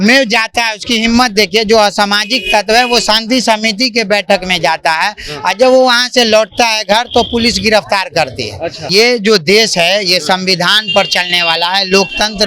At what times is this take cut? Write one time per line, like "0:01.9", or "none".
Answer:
0:08.8